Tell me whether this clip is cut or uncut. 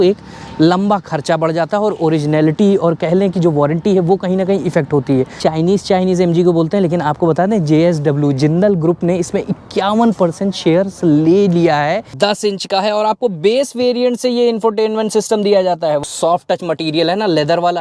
cut